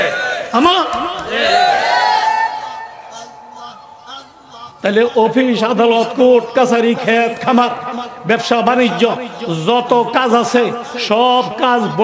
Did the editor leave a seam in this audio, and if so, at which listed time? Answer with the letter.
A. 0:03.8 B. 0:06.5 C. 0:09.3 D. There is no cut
D